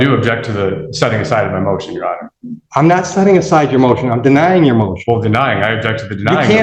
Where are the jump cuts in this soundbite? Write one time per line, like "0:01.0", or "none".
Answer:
none